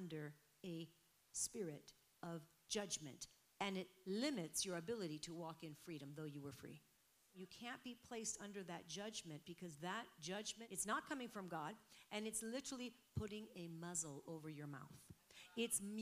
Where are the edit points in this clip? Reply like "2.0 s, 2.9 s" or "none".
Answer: 7.4 s, 10.6 s